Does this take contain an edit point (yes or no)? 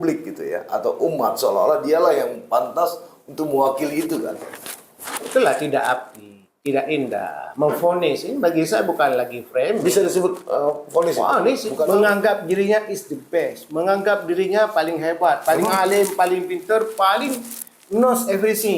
yes